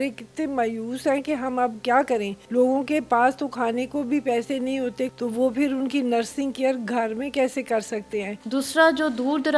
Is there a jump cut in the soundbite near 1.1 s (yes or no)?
no